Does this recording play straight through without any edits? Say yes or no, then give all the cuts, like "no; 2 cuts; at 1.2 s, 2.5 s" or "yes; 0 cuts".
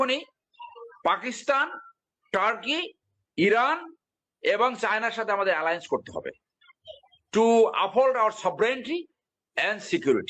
yes; 0 cuts